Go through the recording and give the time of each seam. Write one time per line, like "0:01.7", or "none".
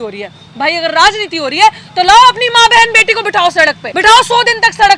0:03.9